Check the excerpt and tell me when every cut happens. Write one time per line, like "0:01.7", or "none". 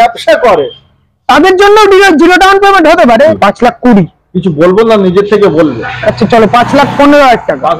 0:03.3

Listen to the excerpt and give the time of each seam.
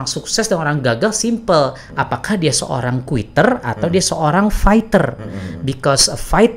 none

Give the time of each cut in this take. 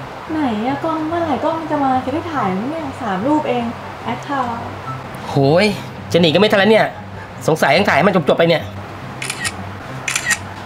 none

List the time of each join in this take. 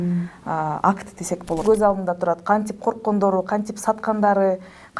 0:01.6

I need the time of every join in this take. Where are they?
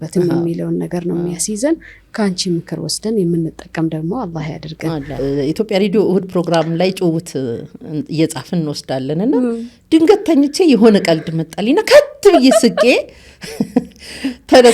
0:05.1

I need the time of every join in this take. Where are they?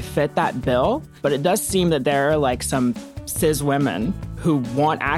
none

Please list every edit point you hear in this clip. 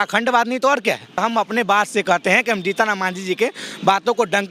0:01.2

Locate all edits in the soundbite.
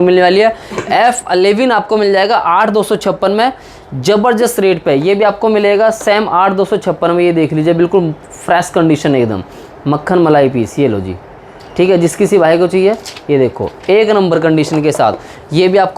none

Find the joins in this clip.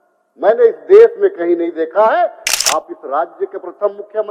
0:02.4

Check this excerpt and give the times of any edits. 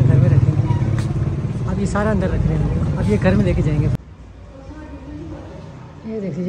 0:04.0

